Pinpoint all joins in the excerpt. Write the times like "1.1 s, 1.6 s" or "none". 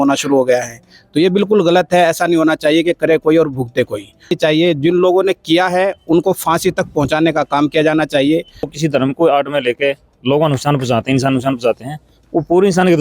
4.3 s, 8.7 s